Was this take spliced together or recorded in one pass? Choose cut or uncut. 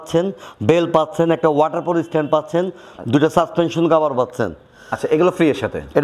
uncut